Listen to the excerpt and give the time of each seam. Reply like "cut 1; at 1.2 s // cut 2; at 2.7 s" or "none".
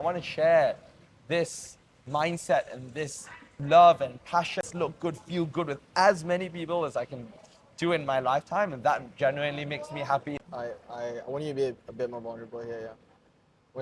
cut 1; at 4.6 s // cut 2; at 10.3 s